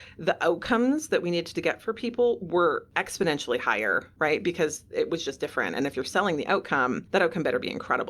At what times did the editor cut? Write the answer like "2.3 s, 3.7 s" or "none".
3.0 s, 4.1 s, 7.0 s